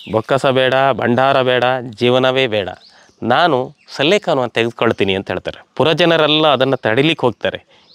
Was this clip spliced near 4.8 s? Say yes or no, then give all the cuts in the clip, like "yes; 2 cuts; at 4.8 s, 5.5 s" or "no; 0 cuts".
no; 0 cuts